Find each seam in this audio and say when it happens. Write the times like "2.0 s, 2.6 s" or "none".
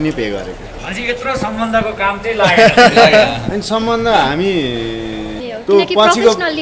5.5 s